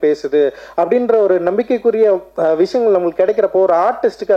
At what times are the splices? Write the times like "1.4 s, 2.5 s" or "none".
none